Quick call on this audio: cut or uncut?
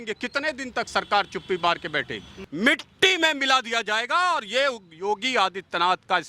cut